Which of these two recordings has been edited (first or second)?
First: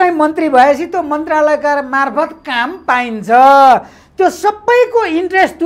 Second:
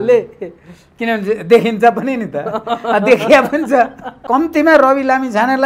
second